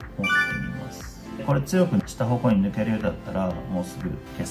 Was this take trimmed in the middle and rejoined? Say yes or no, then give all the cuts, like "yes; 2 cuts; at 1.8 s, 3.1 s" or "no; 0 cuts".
no; 0 cuts